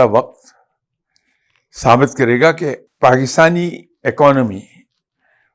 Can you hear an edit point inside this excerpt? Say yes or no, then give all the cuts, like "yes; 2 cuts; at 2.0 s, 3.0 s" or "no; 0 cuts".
yes; 1 cut; at 2.8 s